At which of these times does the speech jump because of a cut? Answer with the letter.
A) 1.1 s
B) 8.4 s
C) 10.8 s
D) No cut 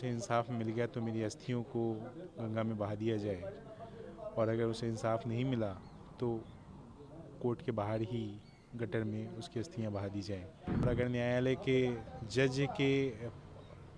C